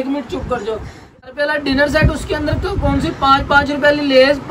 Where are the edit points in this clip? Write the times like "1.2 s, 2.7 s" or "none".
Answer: 1.3 s

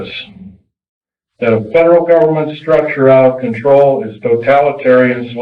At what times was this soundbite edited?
none

